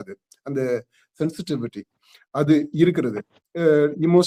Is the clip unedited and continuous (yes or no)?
yes